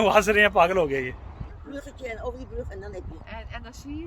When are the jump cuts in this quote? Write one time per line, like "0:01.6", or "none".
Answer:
0:01.5